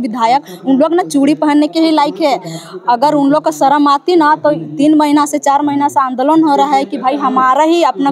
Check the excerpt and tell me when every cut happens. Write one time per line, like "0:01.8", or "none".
none